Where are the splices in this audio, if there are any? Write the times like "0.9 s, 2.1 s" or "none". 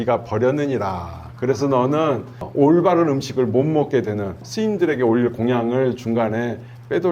2.5 s, 4.4 s